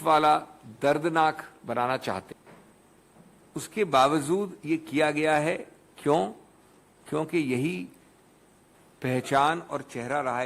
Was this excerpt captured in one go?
no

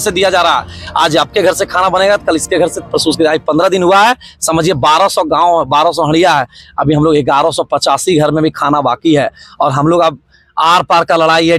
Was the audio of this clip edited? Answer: no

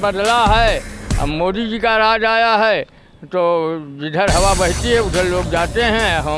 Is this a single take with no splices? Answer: yes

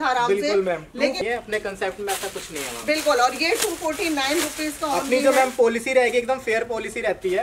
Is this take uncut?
no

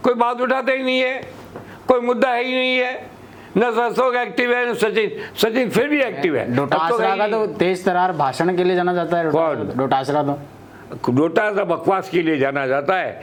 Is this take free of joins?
yes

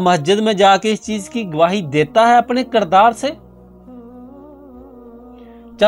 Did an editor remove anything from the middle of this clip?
no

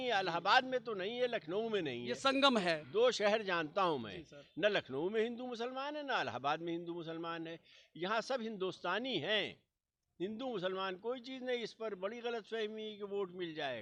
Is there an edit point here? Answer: no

